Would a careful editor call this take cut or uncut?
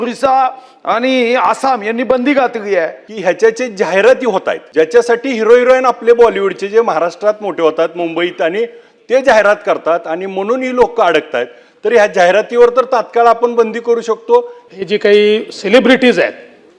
cut